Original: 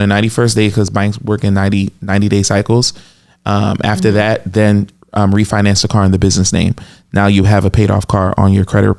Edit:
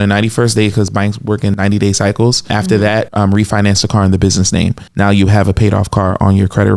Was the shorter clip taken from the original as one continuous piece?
no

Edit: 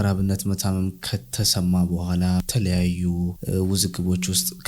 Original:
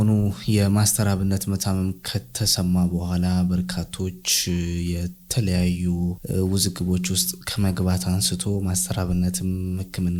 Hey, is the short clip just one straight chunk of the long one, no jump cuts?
no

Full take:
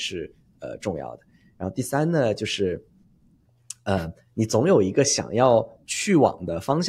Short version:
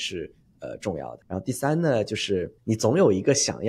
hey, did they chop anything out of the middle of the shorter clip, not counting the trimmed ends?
yes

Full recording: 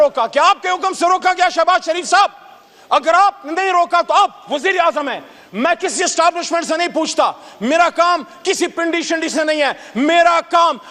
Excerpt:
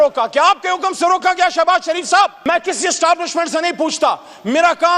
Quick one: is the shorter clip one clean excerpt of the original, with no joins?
no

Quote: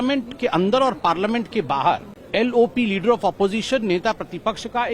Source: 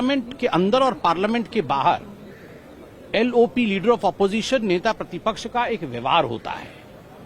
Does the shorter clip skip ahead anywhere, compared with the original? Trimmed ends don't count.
yes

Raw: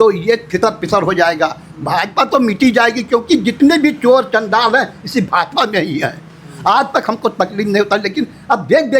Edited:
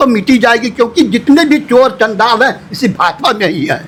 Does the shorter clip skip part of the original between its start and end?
no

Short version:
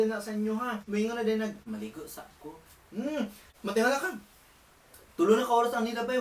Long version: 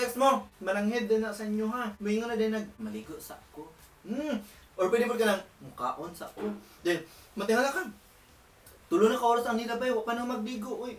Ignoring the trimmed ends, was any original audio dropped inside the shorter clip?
yes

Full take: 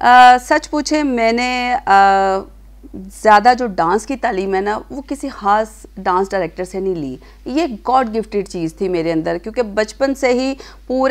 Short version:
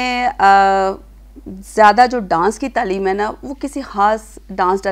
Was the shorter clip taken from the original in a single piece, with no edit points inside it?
yes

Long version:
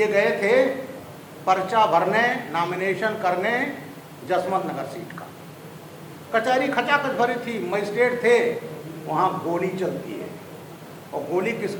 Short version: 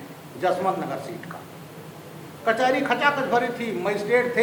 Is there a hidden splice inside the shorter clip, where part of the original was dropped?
no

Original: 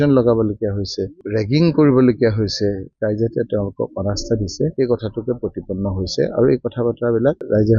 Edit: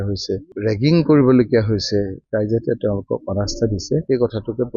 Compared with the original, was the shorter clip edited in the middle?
no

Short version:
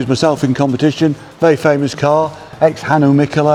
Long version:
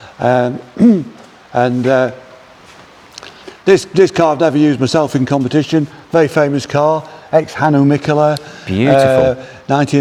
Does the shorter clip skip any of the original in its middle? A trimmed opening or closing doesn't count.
no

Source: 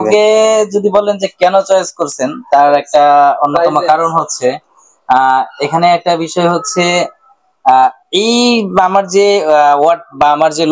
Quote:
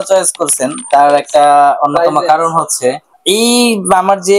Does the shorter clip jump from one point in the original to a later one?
yes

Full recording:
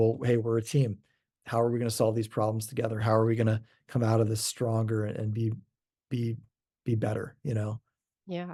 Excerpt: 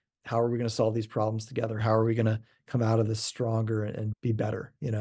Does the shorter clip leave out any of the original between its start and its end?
yes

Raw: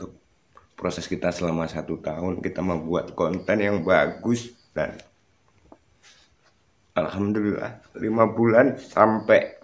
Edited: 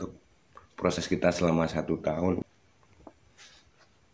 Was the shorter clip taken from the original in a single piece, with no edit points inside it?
no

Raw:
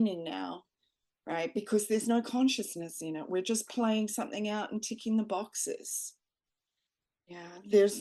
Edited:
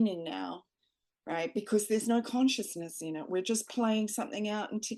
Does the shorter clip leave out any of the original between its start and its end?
no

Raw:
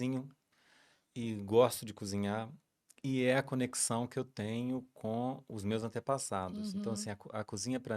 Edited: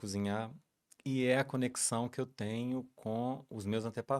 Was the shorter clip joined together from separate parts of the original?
no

